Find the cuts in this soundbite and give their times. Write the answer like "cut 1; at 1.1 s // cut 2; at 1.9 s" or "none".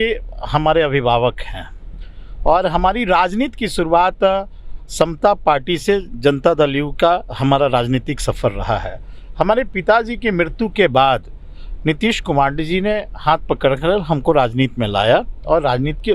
none